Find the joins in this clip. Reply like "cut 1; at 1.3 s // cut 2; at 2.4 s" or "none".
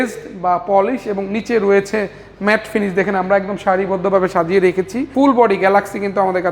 cut 1; at 5.1 s